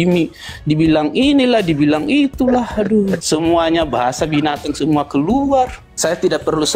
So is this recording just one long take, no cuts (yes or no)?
no